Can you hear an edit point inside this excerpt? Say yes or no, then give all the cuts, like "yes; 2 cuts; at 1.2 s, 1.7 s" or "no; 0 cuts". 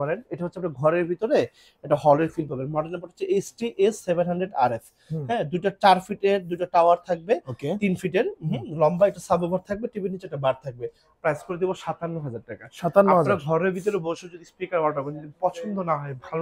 no; 0 cuts